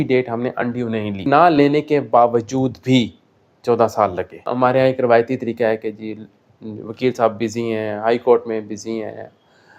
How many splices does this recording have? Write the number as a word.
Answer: two